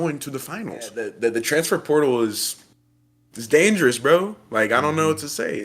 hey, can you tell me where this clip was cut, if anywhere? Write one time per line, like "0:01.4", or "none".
0:01.1